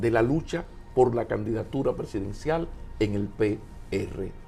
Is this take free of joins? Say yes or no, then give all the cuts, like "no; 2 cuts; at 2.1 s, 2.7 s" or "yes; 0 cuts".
yes; 0 cuts